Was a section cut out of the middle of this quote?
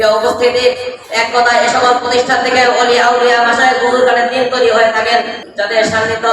yes; 1 cut; at 5.4 s

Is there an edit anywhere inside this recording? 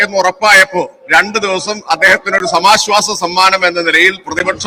no; 0 cuts

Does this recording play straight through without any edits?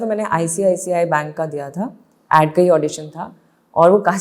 yes; 0 cuts

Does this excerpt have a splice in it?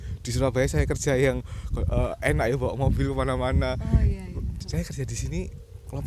no; 0 cuts

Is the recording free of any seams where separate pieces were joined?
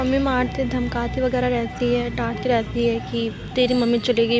yes; 0 cuts

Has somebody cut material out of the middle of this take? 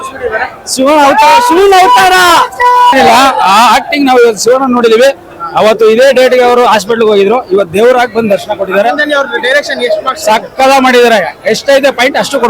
yes; 1 cut; at 2.9 s

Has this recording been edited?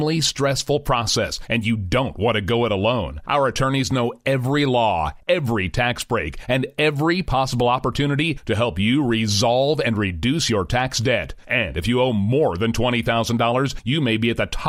no; 0 cuts

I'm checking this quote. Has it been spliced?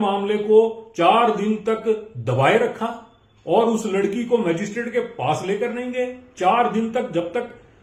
no; 0 cuts

